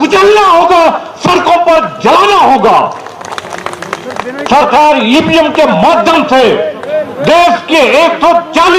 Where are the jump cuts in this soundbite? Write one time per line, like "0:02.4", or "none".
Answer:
none